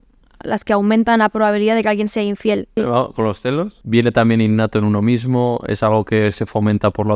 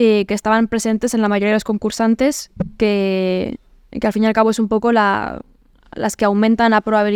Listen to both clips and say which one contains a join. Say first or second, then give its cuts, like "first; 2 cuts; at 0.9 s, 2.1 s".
first; 2 cuts; at 2.8 s, 3.8 s